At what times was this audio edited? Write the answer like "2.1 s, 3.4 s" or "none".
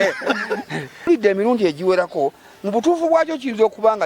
1.1 s